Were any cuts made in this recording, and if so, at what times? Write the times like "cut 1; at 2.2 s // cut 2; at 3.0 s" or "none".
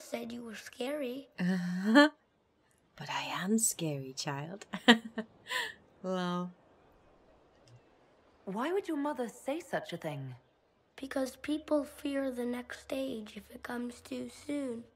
cut 1; at 5.9 s